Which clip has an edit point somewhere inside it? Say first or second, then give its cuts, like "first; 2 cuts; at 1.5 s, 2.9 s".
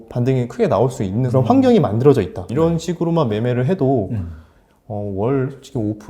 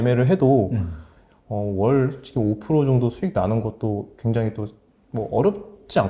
first; 2 cuts; at 1.3 s, 2.5 s